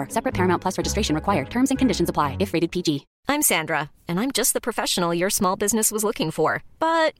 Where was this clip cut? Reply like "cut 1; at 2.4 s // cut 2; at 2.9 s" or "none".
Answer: cut 1; at 3.1 s